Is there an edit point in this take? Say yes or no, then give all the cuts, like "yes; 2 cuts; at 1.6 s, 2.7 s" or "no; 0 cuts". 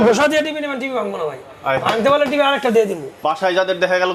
no; 0 cuts